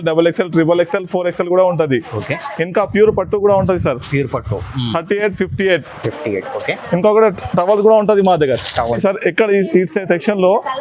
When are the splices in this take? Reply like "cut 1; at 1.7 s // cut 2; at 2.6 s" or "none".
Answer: cut 1; at 9.0 s